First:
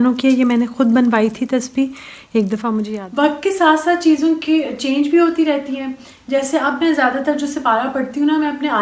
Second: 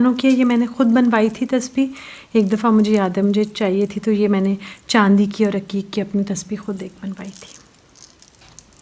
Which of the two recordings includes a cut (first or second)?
first